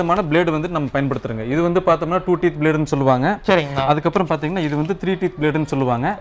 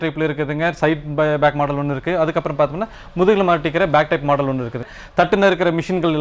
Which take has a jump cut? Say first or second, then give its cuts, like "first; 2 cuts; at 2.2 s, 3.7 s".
second; 1 cut; at 4.9 s